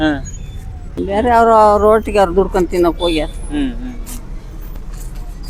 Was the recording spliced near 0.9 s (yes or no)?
yes